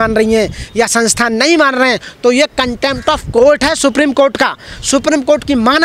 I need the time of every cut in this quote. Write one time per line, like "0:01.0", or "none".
none